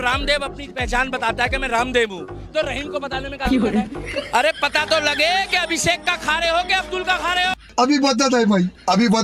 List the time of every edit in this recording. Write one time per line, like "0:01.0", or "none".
0:07.6